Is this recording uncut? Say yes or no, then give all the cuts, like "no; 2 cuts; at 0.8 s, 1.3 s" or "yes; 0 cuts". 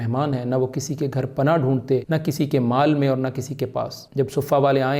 no; 2 cuts; at 2.1 s, 4.0 s